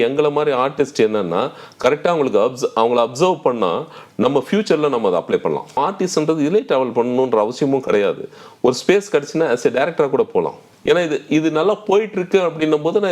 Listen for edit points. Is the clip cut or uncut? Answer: cut